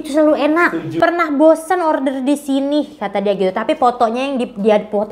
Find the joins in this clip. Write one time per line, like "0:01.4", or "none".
0:01.0